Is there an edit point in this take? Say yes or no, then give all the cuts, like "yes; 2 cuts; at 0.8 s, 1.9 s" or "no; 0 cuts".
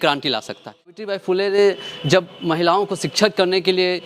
yes; 1 cut; at 0.9 s